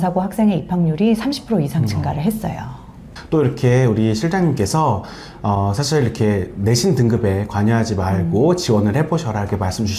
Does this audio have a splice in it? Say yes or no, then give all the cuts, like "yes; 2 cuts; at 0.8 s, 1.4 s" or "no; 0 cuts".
no; 0 cuts